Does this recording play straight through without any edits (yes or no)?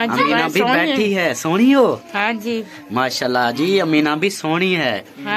yes